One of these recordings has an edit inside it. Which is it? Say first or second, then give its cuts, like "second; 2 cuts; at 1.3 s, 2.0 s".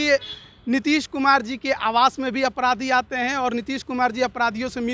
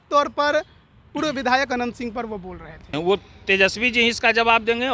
second; 1 cut; at 2.9 s